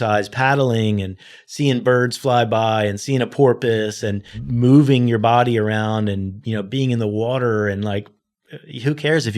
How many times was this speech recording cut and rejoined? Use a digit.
1